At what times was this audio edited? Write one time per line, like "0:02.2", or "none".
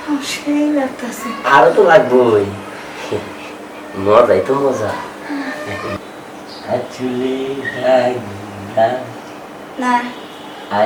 0:05.9